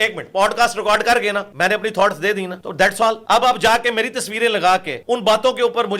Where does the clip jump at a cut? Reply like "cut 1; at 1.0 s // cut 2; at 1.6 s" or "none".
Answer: cut 1; at 1.5 s // cut 2; at 2.6 s // cut 3; at 3.2 s // cut 4; at 4.9 s